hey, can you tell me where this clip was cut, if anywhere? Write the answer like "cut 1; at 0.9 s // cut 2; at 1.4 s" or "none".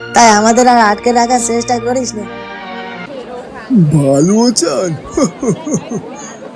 cut 1; at 3.0 s